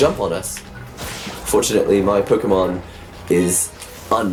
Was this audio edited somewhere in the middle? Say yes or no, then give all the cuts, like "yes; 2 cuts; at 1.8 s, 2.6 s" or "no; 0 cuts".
no; 0 cuts